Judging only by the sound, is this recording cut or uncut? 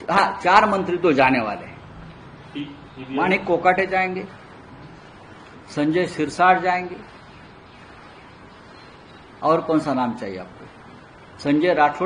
uncut